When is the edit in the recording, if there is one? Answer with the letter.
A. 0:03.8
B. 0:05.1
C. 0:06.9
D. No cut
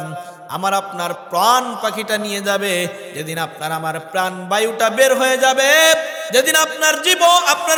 D